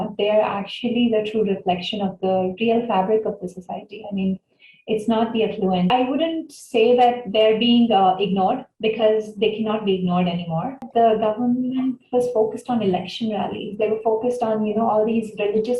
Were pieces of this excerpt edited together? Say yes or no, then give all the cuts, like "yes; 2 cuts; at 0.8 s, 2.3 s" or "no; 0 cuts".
yes; 2 cuts; at 5.9 s, 10.9 s